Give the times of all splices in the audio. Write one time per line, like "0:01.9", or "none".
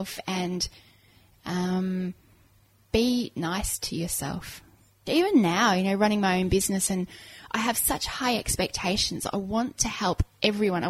0:05.0